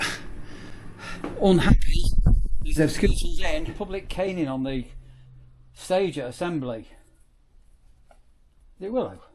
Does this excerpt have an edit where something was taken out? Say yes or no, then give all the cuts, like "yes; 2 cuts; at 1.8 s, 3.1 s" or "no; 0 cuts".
yes; 1 cut; at 3.8 s